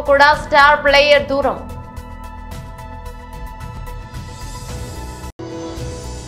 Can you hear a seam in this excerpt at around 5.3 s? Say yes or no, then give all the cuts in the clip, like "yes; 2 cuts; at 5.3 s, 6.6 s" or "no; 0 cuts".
yes; 2 cuts; at 3.8 s, 5.3 s